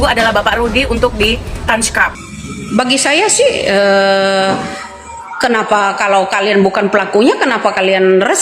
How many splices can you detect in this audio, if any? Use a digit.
1